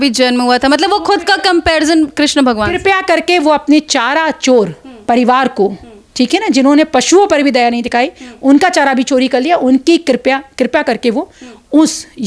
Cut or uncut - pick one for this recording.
cut